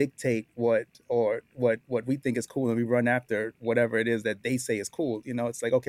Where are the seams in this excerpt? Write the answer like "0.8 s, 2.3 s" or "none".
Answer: none